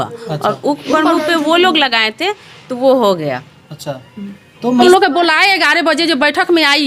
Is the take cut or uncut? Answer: cut